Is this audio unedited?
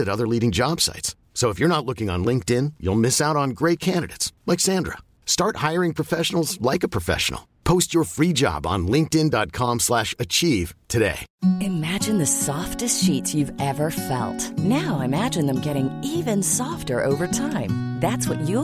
no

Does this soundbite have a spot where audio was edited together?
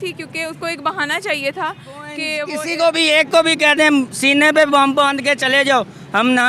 yes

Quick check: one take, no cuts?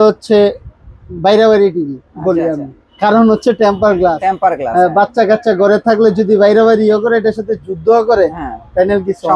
yes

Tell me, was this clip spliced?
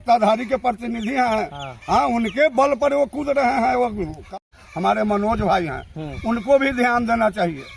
yes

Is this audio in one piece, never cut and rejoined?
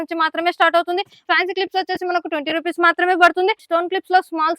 no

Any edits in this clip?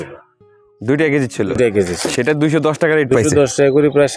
no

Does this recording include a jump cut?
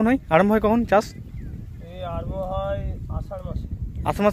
no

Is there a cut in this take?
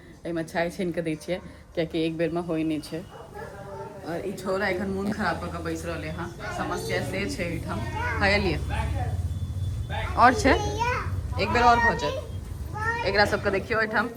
no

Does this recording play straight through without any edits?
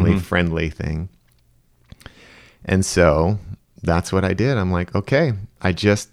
yes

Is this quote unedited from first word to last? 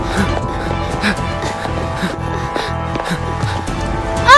yes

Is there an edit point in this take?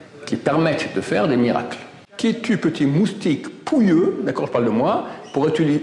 yes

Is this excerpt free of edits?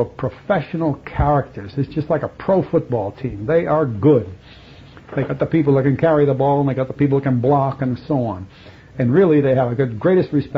no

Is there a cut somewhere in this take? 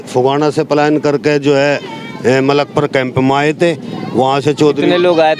no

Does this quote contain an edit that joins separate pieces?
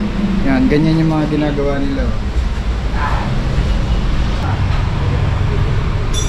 no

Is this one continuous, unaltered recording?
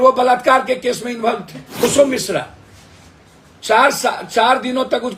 yes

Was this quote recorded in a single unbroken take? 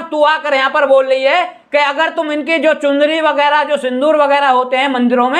yes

